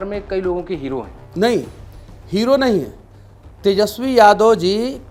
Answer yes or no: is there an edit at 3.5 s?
no